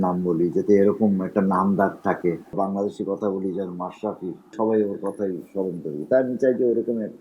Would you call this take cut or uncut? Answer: cut